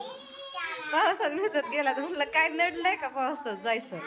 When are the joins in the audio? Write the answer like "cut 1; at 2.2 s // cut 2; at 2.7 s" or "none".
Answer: none